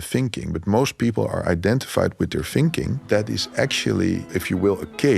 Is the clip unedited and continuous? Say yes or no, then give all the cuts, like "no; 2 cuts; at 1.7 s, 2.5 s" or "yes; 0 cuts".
no; 2 cuts; at 3.0 s, 4.2 s